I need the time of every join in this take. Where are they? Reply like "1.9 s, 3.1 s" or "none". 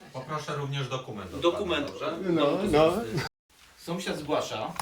3.3 s